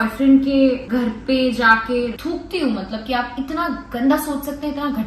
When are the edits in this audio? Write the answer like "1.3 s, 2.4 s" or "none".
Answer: 2.1 s

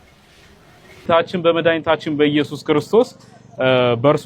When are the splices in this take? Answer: 1.1 s

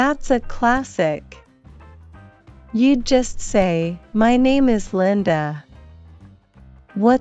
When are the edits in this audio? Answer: 1.3 s, 2.7 s

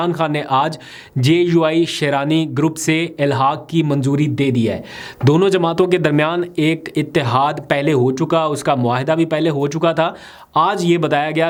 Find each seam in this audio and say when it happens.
none

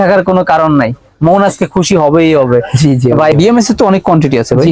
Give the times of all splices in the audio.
3.3 s

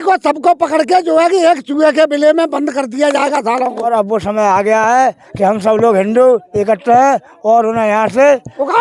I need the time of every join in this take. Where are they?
3.9 s

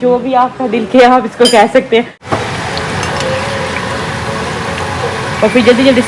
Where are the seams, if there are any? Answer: 2.2 s

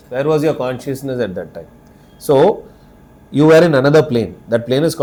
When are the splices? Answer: none

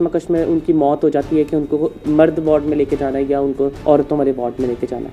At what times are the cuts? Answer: 2.0 s, 3.8 s

